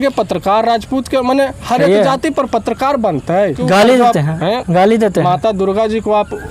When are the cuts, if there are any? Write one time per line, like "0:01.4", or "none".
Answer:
0:03.6